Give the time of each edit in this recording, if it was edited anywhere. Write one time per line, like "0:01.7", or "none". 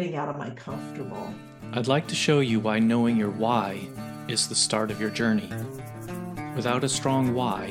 0:01.3